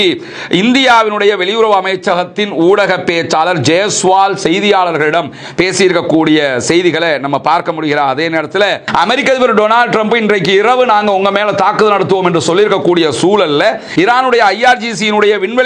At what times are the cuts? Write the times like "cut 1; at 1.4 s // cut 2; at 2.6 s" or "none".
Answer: cut 1; at 8.8 s